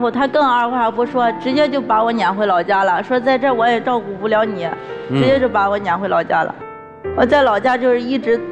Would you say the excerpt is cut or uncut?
uncut